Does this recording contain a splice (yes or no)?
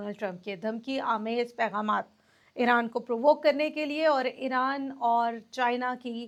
no